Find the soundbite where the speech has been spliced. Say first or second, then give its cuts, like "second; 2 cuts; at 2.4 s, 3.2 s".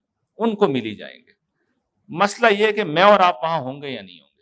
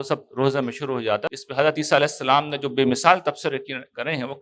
second; 1 cut; at 1.2 s